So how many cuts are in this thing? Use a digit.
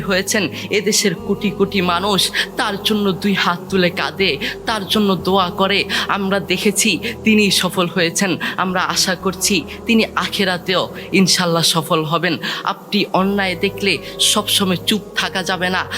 0